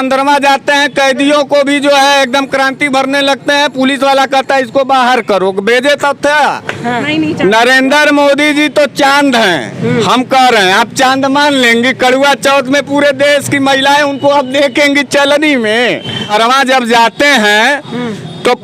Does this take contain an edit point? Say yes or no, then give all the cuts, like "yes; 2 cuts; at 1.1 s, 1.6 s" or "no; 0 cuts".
yes; 2 cuts; at 7.0 s, 16.3 s